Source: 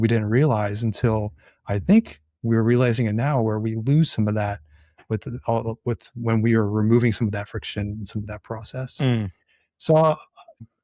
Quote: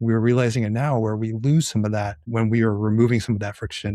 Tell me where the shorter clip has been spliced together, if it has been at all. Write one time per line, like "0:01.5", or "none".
0:02.2